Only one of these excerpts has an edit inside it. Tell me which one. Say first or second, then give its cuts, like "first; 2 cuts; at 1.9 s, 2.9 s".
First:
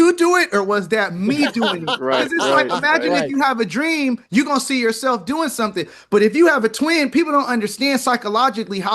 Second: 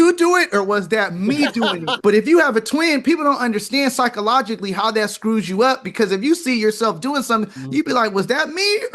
second; 1 cut; at 1.9 s